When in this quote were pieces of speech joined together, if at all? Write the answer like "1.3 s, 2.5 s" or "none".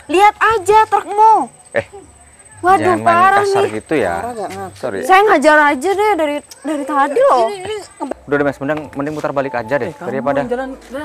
7.9 s